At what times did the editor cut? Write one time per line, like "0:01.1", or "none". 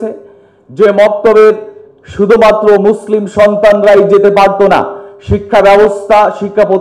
none